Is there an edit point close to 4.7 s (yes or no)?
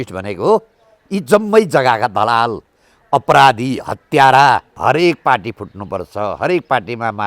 yes